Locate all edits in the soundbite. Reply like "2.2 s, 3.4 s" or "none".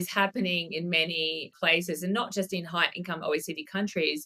1.5 s